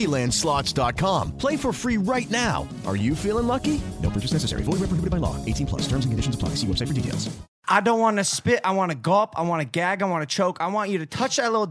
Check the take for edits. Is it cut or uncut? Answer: cut